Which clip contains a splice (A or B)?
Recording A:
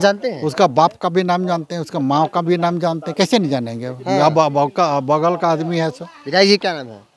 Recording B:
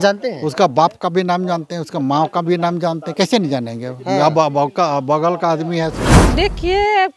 B